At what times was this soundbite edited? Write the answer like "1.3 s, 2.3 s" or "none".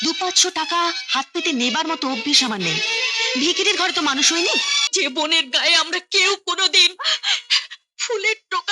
4.8 s